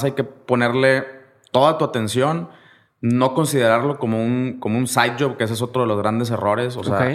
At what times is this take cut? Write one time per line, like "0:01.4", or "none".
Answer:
none